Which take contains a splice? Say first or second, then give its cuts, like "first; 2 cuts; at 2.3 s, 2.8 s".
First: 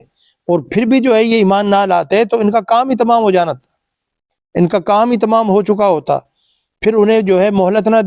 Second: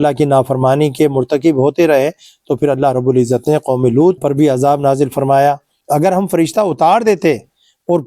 second; 2 cuts; at 4.2 s, 5.7 s